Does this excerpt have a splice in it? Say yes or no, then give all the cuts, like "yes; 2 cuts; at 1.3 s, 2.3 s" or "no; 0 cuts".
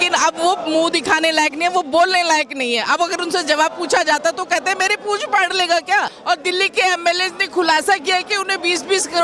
yes; 1 cut; at 6.1 s